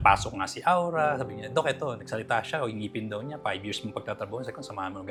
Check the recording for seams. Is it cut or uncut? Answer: uncut